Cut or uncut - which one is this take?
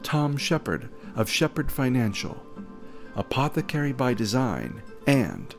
uncut